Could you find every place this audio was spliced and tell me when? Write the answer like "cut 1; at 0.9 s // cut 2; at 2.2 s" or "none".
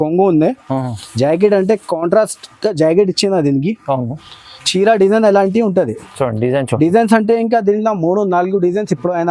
none